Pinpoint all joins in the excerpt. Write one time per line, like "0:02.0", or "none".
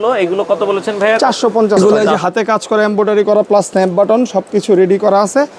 0:01.8

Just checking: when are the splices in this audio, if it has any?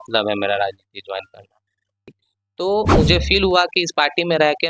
0:02.0

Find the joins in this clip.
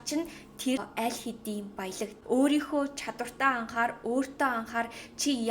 0:00.9
0:02.1

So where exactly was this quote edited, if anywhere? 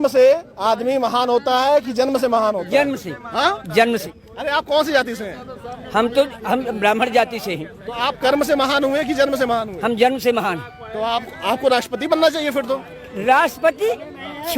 0:04.1

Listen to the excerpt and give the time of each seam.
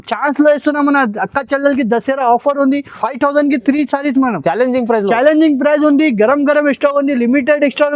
0:02.9

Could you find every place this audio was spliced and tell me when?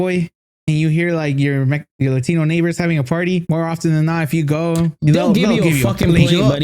0:03.4
0:05.0

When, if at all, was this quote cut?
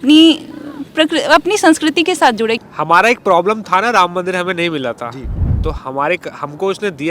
0:02.6

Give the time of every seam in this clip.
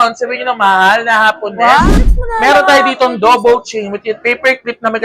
0:01.9

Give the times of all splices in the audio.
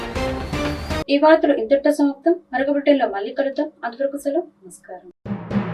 none

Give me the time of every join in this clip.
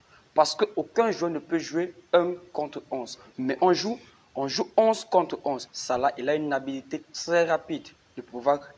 0:05.7

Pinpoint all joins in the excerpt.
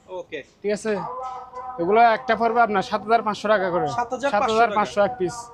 none

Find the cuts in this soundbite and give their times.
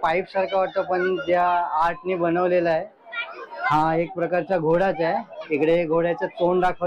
none

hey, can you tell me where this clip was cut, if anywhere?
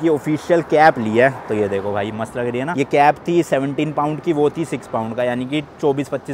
none

